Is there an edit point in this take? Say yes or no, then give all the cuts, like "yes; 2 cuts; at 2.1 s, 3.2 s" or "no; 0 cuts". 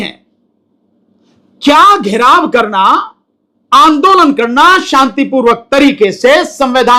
no; 0 cuts